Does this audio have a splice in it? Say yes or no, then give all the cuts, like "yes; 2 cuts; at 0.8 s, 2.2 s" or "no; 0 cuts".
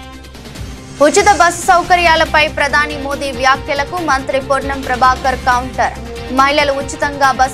no; 0 cuts